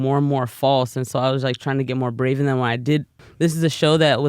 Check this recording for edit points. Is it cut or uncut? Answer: cut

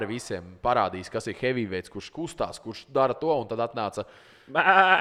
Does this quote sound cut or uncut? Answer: uncut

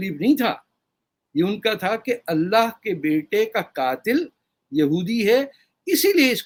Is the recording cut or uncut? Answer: uncut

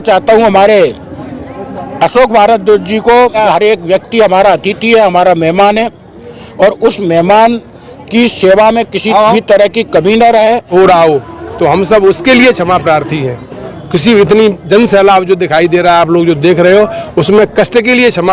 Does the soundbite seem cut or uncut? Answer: cut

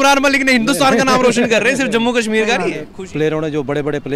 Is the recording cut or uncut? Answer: cut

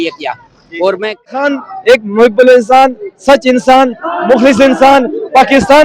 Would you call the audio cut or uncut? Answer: cut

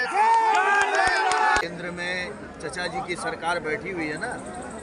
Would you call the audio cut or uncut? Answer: cut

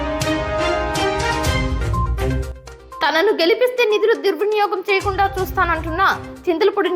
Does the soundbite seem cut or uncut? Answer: cut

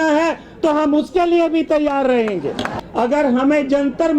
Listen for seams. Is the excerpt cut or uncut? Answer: cut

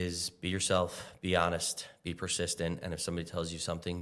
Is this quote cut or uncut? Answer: uncut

